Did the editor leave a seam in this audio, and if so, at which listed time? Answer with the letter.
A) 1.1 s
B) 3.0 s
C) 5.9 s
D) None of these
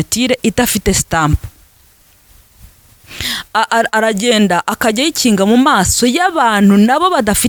D